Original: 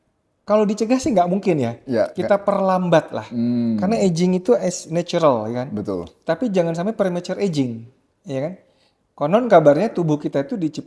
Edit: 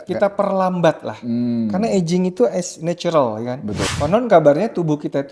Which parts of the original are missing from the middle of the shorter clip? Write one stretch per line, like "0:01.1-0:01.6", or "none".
0:06.0-0:09.1